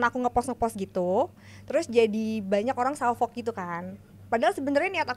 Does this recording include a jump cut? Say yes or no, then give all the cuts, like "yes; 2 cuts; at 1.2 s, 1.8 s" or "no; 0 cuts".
no; 0 cuts